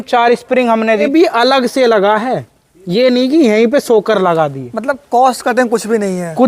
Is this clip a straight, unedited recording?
no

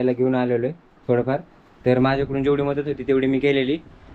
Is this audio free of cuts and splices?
yes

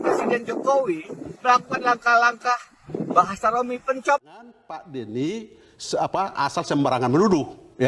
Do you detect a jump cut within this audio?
yes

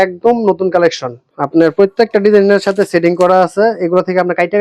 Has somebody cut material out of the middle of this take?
no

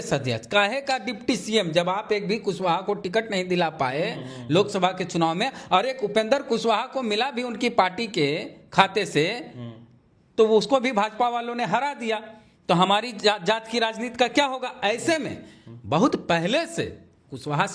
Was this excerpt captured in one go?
yes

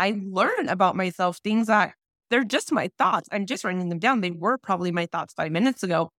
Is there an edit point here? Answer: no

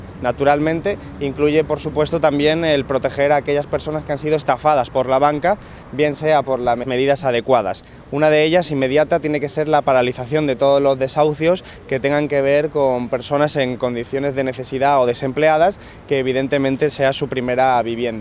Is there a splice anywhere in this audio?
no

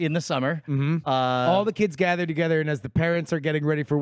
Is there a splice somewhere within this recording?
no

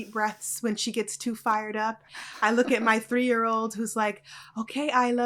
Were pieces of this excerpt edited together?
no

